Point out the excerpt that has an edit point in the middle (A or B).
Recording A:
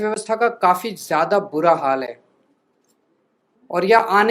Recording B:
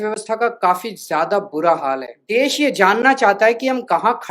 B